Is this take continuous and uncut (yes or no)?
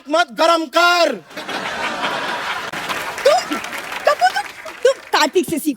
no